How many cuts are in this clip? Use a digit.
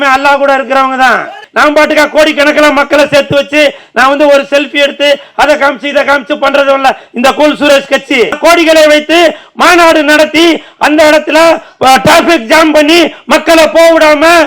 2